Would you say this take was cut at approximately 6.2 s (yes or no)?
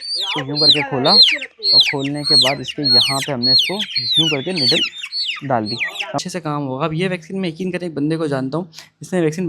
yes